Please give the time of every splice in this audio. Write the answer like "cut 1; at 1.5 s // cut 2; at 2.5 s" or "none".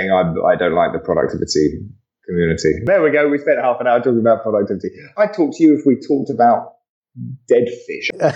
cut 1; at 2.9 s